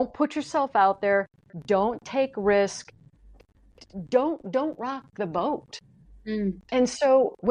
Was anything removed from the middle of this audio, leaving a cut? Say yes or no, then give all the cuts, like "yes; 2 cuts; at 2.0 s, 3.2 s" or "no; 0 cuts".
no; 0 cuts